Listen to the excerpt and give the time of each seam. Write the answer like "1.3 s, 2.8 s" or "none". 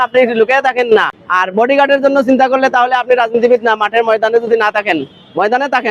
none